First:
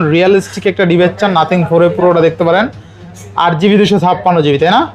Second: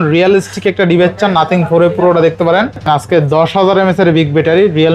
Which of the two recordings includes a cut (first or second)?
second